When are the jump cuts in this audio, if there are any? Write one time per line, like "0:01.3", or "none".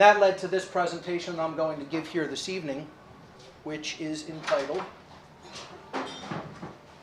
none